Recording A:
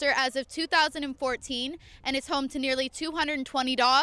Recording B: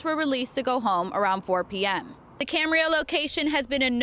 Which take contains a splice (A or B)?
B